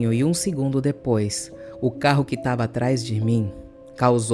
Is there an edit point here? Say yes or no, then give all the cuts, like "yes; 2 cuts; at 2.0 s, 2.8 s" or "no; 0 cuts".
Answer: no; 0 cuts